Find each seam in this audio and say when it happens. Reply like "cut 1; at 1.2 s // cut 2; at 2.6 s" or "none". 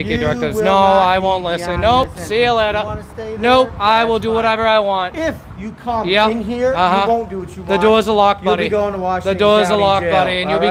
none